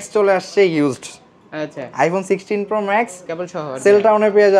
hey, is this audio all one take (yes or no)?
yes